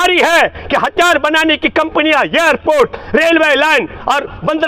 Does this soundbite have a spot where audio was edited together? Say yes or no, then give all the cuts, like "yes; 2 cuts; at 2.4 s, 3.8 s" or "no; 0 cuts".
no; 0 cuts